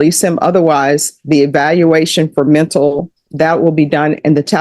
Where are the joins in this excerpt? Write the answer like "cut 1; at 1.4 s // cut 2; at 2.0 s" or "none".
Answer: cut 1; at 3.2 s